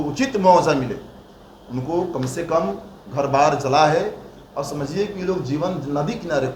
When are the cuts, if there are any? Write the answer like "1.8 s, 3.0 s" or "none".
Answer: none